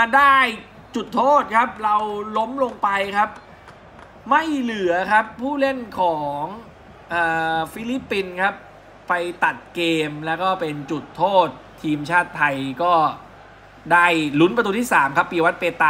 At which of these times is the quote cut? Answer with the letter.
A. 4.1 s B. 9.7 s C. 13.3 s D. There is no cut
D